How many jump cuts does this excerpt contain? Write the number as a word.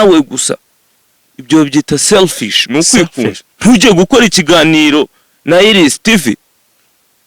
one